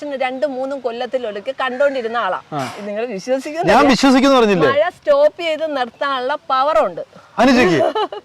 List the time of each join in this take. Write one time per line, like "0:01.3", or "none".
0:02.7